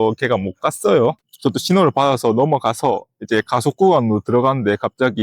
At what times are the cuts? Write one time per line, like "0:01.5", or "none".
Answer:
0:01.3